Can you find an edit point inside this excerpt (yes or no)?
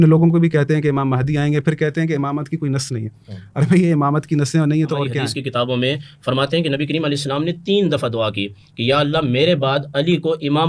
yes